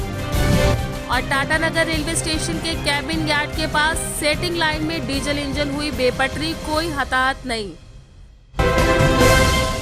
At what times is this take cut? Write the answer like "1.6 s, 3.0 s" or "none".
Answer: 8.4 s